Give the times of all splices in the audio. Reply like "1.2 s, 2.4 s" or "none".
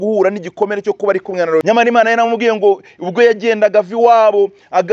1.6 s